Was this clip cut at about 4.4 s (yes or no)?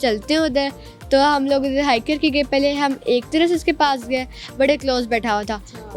no